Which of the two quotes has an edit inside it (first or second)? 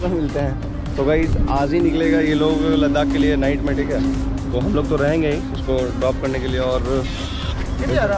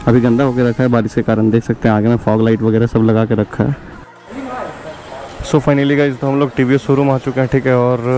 second